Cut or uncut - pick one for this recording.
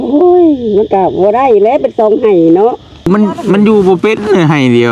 cut